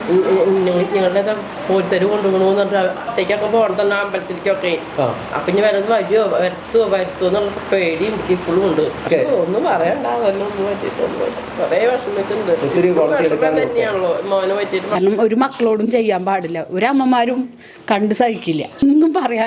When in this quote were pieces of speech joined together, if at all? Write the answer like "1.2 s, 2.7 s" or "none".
3.1 s, 9.0 s, 14.9 s